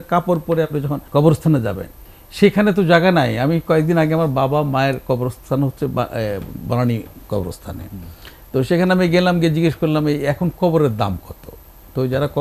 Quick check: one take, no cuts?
no; 1 cut; at 1.0 s

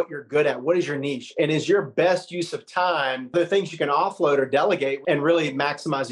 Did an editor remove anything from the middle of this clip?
yes; 2 cuts; at 3.3 s, 5.0 s

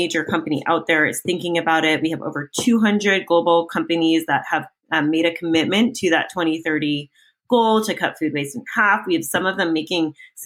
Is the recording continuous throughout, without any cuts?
yes; 0 cuts

